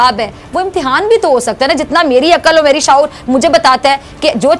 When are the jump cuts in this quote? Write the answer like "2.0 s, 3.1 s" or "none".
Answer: none